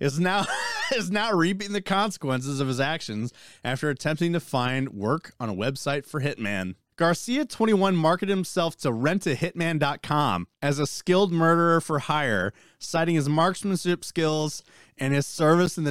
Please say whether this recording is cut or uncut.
cut